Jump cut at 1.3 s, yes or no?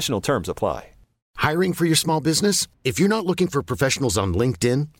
yes